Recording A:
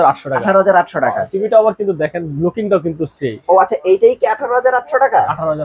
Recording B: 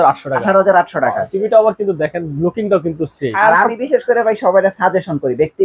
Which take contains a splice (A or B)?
B